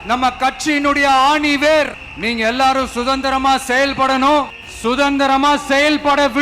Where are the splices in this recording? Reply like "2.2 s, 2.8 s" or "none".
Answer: 2.1 s, 4.6 s